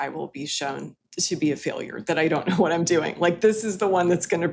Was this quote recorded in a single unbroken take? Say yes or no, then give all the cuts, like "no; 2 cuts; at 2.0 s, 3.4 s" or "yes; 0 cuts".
no; 1 cut; at 1.0 s